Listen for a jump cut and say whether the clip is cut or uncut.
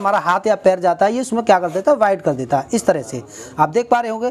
uncut